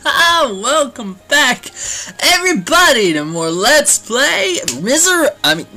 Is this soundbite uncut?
yes; 0 cuts

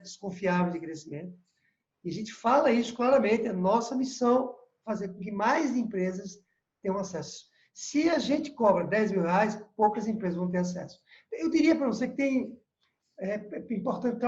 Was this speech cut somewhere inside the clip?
no; 0 cuts

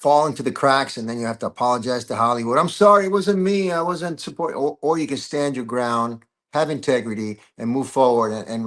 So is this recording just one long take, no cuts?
yes; 0 cuts

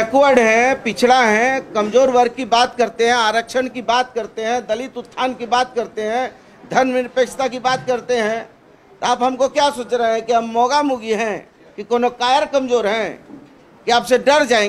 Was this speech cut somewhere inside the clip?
no; 0 cuts

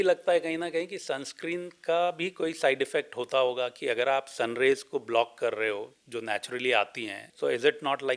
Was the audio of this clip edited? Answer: yes; 1 cut; at 7.2 s

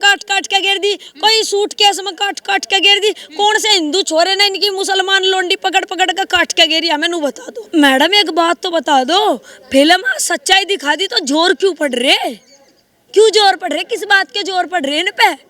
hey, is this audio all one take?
no; 1 cut; at 7.5 s

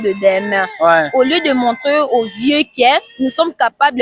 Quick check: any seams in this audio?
no; 0 cuts

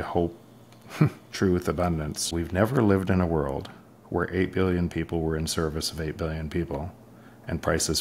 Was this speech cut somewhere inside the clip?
yes; 1 cut; at 2.2 s

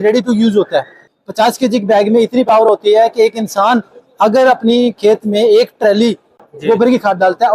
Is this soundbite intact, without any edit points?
no; 1 cut; at 1.0 s

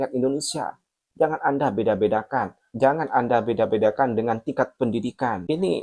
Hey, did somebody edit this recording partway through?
no; 0 cuts

